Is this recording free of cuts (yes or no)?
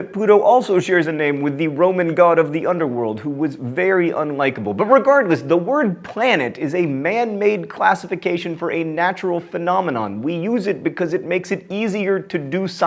no